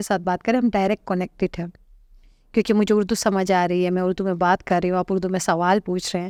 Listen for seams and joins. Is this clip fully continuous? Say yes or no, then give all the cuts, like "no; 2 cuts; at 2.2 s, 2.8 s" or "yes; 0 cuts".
yes; 0 cuts